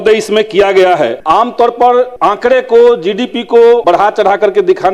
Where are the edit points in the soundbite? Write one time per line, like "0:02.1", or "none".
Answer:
0:01.2
0:02.1
0:03.8